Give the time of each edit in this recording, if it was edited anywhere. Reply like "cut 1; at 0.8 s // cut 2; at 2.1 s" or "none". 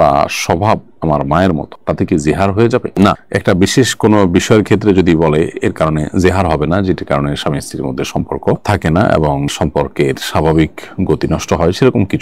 none